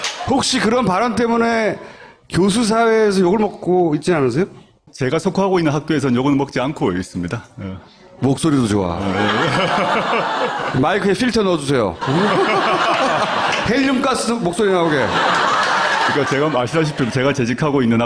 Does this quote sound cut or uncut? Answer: uncut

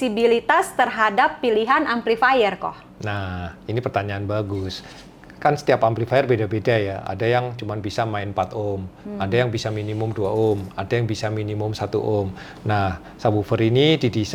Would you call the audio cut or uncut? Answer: uncut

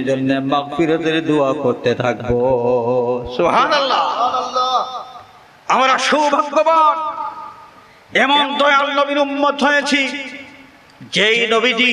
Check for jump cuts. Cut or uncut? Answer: uncut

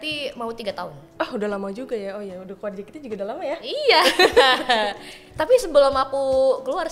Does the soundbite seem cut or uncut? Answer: uncut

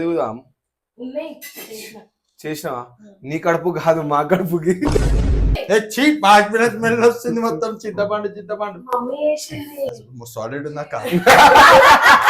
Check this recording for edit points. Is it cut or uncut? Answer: cut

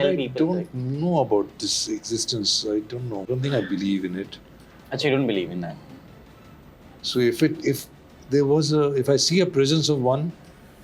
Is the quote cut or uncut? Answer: cut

